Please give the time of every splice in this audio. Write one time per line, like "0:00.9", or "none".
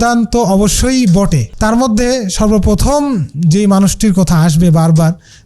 0:01.5